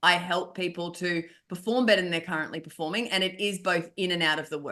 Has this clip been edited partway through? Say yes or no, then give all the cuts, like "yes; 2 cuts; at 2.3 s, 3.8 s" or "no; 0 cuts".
no; 0 cuts